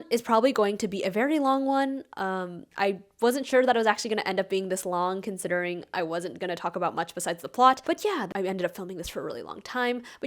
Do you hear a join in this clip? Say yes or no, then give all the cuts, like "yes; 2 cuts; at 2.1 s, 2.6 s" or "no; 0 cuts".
yes; 1 cut; at 8.1 s